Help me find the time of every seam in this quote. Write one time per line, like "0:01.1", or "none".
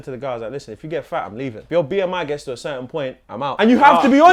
0:01.6
0:03.4